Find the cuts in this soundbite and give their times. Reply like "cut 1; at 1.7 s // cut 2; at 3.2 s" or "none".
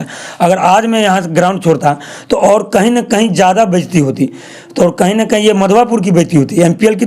none